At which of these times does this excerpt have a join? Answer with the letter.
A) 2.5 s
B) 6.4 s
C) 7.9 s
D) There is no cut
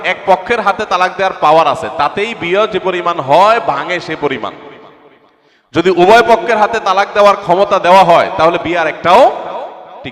D